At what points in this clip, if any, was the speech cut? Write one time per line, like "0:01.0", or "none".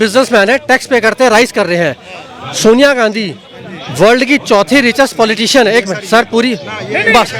none